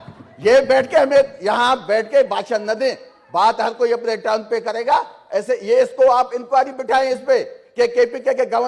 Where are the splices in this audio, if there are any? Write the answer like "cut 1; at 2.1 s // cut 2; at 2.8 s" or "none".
none